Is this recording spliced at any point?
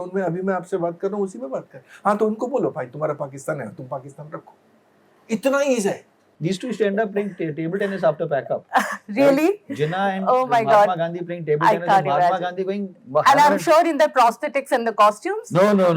yes; 1 cut; at 6.3 s

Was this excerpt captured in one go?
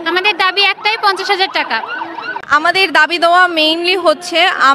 no; 1 cut; at 2.3 s

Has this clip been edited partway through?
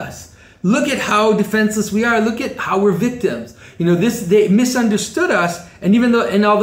no; 0 cuts

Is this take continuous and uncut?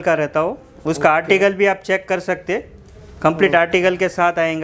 yes; 0 cuts

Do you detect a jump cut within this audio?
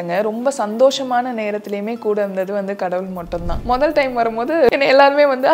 yes; 2 cuts; at 3.5 s, 4.7 s

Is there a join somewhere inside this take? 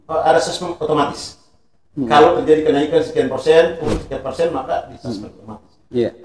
no; 0 cuts

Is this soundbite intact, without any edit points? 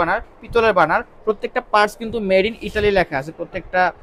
yes; 0 cuts

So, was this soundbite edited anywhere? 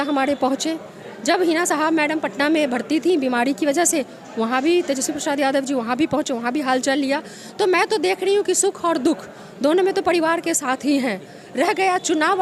no; 0 cuts

